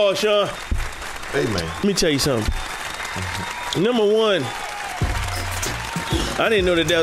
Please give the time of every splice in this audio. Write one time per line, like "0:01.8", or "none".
none